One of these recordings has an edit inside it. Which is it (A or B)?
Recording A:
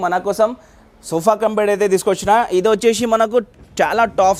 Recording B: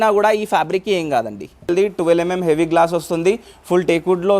B